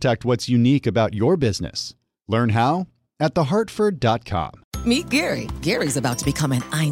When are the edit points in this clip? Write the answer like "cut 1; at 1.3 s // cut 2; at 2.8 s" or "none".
cut 1; at 4.6 s